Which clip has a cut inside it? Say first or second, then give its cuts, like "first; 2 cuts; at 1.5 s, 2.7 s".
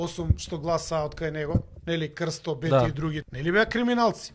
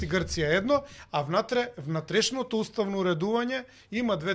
first; 2 cuts; at 1.7 s, 3.3 s